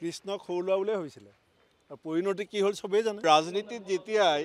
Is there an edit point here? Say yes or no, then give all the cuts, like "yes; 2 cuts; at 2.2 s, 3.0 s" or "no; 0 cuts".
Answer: yes; 1 cut; at 3.2 s